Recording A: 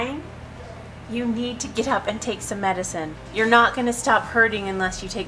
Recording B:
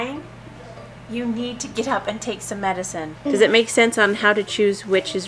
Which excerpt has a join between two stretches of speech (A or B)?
B